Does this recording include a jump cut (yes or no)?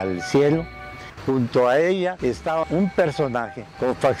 yes